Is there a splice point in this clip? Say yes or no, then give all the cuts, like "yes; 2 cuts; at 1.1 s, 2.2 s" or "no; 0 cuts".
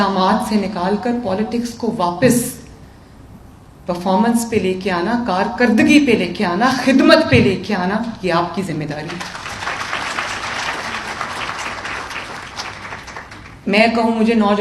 no; 0 cuts